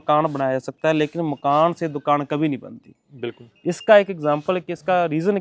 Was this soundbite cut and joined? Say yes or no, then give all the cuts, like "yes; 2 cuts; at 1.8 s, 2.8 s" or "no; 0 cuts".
no; 0 cuts